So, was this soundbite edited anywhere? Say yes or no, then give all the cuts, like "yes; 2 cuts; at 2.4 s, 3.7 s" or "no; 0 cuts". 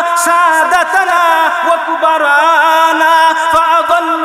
no; 0 cuts